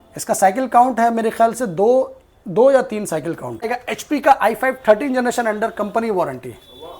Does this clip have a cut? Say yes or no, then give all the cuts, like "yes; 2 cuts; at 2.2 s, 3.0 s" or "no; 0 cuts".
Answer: yes; 1 cut; at 3.7 s